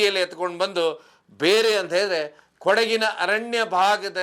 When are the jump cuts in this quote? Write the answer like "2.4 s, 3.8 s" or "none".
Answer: none